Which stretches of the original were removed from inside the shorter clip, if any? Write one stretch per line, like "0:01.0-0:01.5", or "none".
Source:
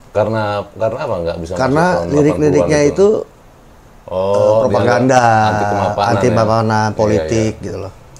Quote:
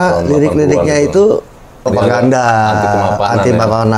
0:03.7-0:04.6